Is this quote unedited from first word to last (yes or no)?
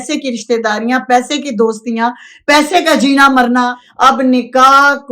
no